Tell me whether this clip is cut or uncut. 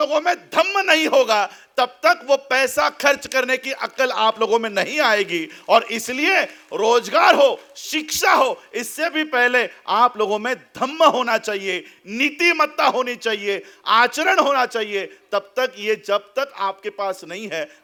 uncut